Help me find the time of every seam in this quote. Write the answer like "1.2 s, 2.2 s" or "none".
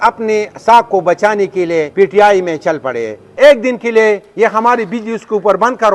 1.9 s, 3.3 s